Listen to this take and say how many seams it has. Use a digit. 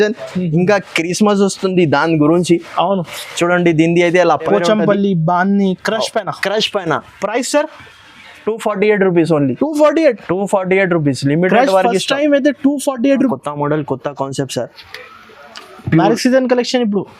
2